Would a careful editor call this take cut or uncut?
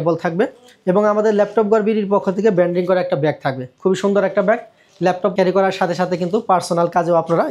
cut